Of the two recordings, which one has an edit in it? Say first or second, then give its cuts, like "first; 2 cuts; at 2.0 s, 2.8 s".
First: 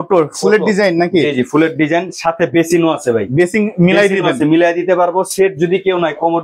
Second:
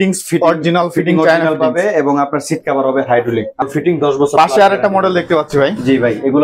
second; 1 cut; at 3.6 s